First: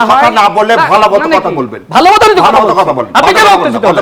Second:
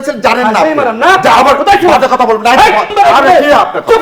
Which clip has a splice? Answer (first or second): second